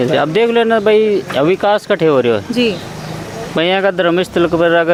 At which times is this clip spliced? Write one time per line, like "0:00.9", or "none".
none